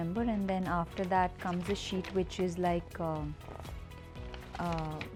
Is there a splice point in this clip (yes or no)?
no